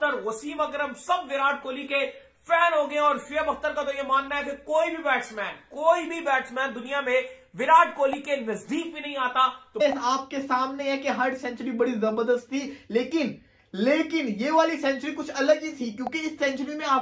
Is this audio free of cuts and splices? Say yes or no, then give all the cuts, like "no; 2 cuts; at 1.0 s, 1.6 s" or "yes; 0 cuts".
no; 1 cut; at 9.8 s